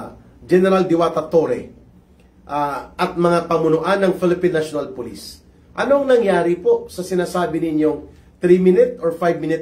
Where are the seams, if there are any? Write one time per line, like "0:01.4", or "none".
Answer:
none

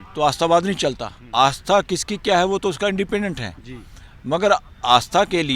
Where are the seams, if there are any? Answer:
0:01.1

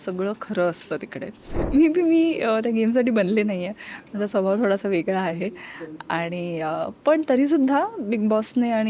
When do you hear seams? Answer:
0:01.6

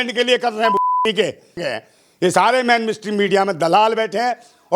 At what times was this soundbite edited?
0:01.7

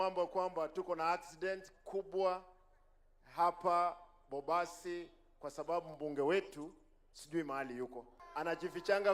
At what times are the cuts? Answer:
0:08.1

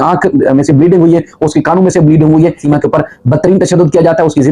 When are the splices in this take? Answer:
0:02.6

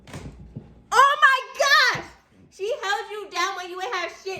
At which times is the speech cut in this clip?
none

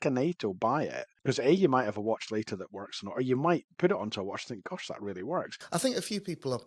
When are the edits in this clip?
0:01.1
0:05.6

